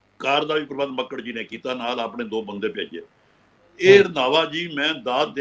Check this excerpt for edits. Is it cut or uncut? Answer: uncut